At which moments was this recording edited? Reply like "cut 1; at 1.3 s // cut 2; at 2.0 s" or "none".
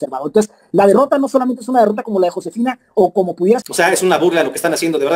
cut 1; at 3.6 s